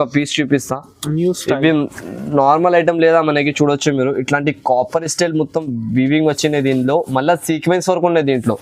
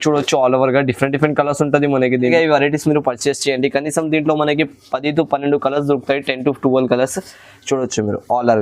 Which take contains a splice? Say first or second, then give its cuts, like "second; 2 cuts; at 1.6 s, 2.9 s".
second; 1 cut; at 2.3 s